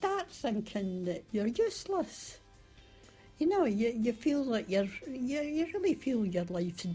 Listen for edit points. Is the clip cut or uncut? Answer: cut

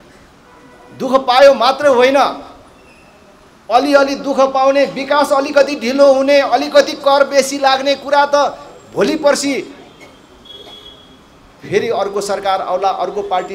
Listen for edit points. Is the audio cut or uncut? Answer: uncut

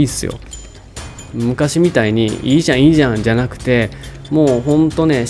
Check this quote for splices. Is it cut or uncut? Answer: uncut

